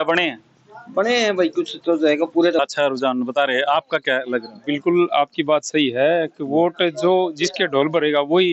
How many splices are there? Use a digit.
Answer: 1